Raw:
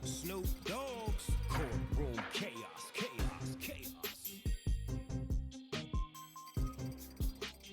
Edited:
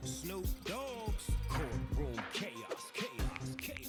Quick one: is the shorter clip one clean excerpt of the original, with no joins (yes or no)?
yes